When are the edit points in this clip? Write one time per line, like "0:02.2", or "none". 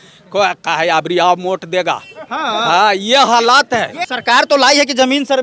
0:04.1